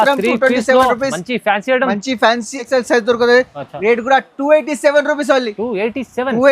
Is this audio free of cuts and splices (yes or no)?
no